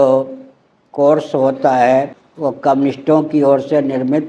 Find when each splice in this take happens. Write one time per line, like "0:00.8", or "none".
0:02.8